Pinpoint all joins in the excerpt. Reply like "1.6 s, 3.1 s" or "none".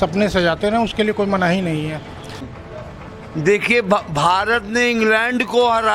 2.5 s